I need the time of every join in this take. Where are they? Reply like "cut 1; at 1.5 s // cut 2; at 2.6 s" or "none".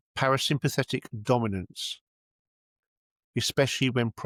none